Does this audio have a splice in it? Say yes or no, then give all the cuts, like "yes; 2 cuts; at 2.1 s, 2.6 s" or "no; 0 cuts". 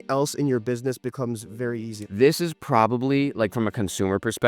yes; 1 cut; at 2.0 s